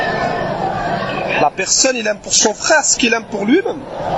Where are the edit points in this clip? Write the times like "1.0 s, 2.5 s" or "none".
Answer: none